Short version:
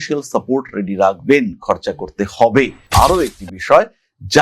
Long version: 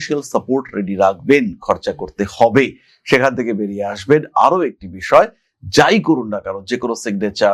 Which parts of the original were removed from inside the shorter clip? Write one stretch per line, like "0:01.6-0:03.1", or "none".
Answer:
0:02.9-0:04.3